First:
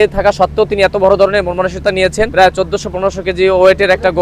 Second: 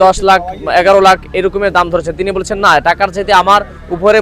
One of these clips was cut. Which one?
first; 1 cut; at 2.3 s

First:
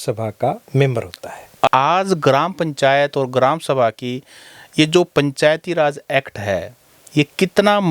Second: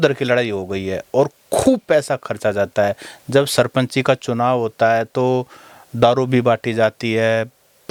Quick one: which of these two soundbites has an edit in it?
first; 1 cut; at 1.7 s

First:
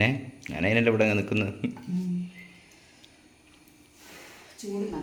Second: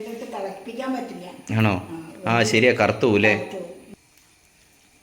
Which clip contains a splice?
second; 1 cut; at 3.9 s

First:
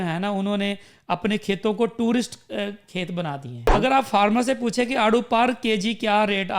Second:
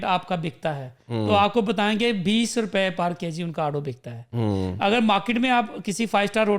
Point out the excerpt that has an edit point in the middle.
first; 1 cut; at 3.7 s

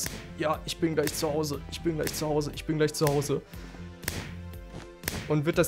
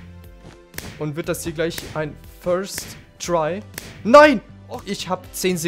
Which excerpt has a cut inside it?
second; 1 cut; at 4.5 s

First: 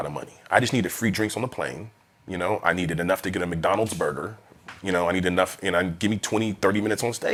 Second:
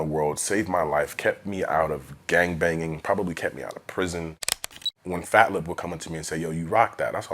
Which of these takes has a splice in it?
second; 1 cut; at 4.8 s

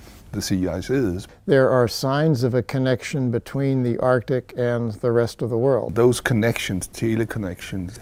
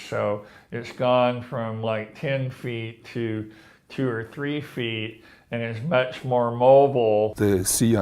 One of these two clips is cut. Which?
second; 1 cut; at 5.8 s

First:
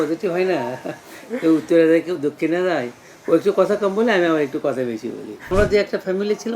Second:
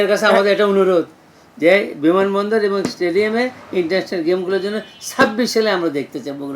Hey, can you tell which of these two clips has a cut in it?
first; 1 cut; at 5.5 s

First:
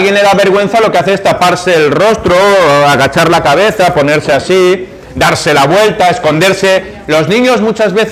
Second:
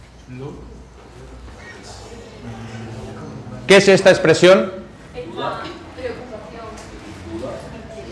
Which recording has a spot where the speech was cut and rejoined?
first; 1 cut; at 3.8 s

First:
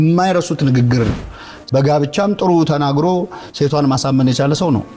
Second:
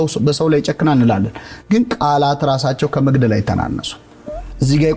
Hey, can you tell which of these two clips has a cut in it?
first; 1 cut; at 1.3 s

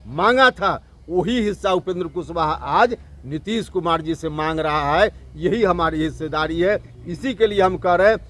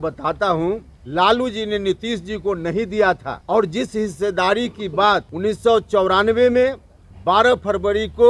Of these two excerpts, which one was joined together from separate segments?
second; 3 cuts; at 0.9 s, 3.3 s, 5.3 s

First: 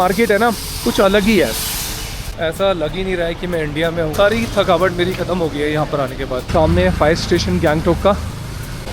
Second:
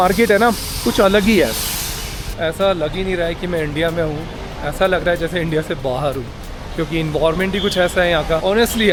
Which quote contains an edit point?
first; 2 cuts; at 4.1 s, 6.5 s

